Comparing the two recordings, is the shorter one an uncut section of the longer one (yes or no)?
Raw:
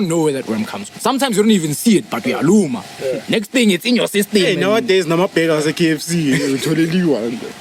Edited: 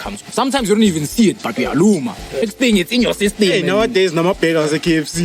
no